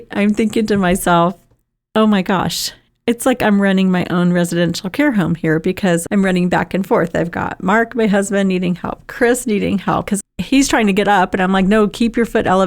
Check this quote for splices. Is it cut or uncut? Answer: cut